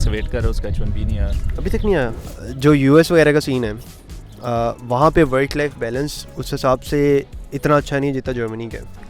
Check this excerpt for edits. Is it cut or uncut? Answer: cut